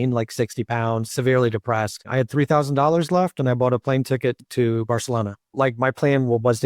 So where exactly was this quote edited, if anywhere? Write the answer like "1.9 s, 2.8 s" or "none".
1.1 s, 2.0 s, 4.4 s, 5.5 s